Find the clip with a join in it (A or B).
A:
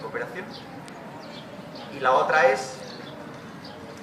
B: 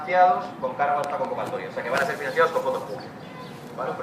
A